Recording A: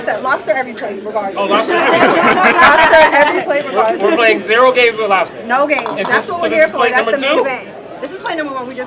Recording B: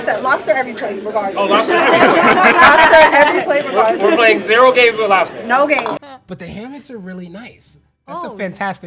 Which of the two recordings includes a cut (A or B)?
B